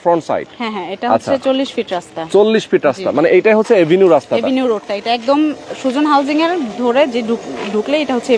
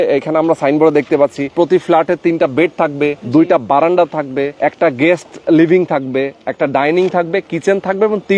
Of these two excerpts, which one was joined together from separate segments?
second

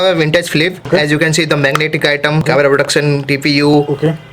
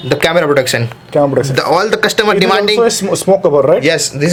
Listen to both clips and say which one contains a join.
first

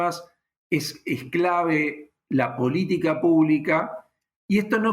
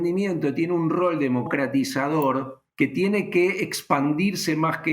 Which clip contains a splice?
second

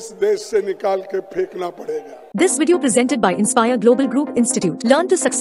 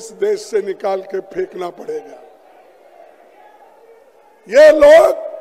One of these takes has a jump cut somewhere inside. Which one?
first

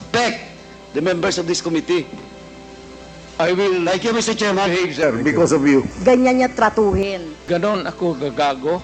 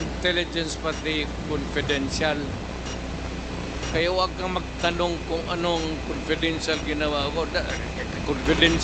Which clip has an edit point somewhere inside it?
first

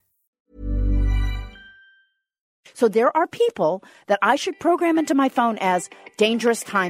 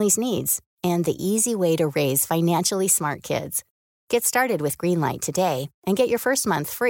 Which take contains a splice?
first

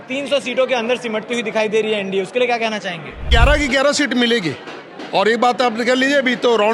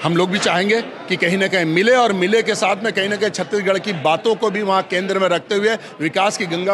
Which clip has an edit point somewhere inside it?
first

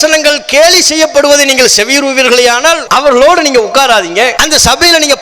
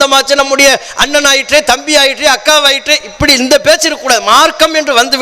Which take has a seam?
first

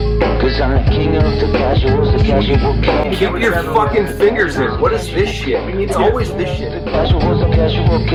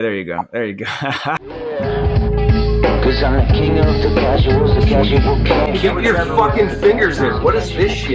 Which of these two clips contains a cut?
second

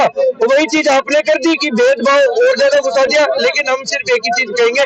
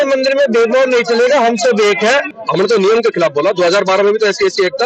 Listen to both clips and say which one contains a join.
second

